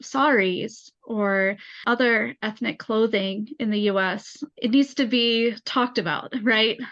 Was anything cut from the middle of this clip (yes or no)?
no